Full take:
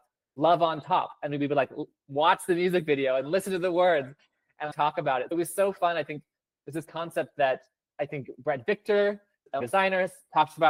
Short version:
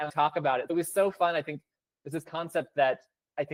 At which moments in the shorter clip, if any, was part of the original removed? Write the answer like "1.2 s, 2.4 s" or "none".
none